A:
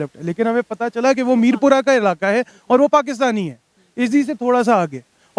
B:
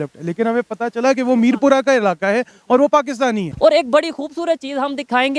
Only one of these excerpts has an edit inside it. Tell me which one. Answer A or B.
B